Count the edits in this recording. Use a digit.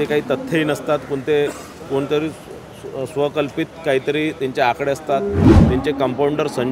1